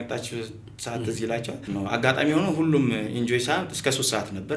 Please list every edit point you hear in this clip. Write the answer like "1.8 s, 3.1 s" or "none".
1.7 s